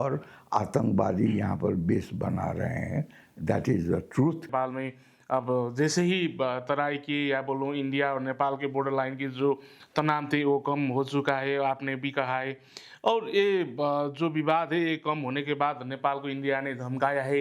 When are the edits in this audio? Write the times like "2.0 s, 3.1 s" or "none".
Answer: 4.5 s